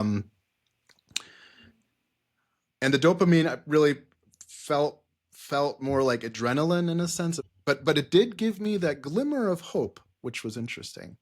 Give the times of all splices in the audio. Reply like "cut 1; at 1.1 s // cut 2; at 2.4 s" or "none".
cut 1; at 7.4 s

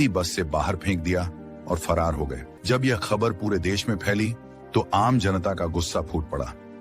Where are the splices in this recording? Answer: cut 1; at 2.5 s

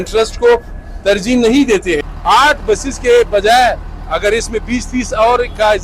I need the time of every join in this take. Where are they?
cut 1; at 2.1 s

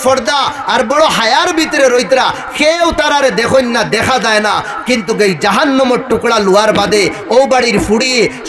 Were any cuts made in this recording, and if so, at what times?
none

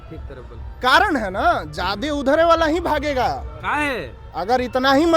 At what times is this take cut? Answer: none

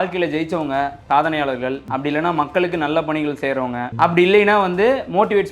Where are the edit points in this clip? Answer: cut 1; at 1.0 s // cut 2; at 1.8 s // cut 3; at 3.9 s

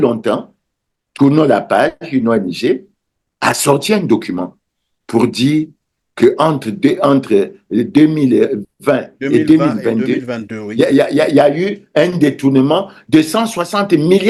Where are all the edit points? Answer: none

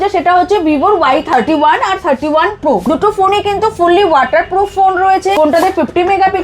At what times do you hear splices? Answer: cut 1; at 2.8 s // cut 2; at 5.3 s

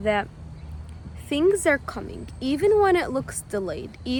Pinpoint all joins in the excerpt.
none

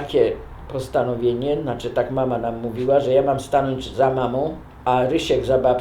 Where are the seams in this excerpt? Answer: cut 1; at 4.8 s

